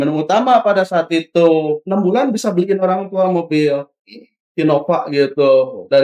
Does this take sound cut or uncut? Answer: cut